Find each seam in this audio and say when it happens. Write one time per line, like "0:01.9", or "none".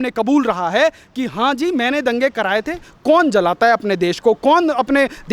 0:02.8